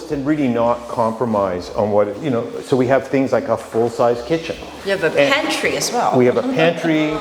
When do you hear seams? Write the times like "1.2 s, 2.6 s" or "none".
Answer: none